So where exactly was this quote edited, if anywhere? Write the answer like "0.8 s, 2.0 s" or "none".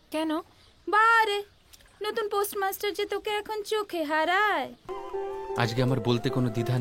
5.0 s